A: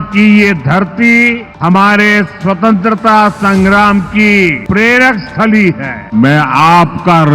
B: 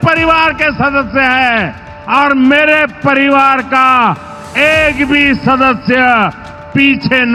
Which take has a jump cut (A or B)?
A